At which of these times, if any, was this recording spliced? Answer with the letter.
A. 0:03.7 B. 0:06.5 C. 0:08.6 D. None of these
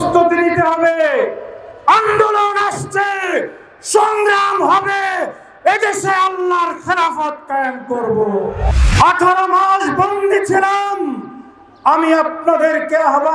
C